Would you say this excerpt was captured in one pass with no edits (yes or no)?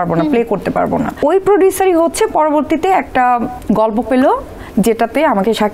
no